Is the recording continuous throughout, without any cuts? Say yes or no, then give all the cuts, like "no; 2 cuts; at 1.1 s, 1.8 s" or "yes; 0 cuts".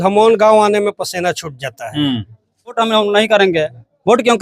no; 1 cut; at 2.8 s